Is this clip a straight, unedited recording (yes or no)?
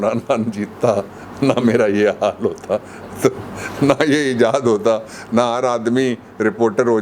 yes